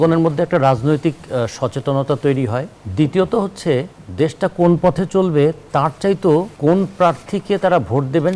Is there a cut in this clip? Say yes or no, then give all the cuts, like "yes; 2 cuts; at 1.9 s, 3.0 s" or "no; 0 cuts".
yes; 3 cuts; at 2.8 s, 4.0 s, 6.5 s